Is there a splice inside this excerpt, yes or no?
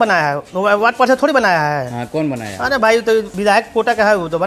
yes